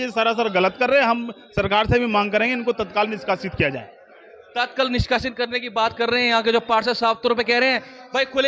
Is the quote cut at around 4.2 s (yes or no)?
no